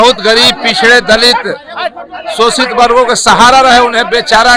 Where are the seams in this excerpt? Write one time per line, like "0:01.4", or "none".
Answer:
none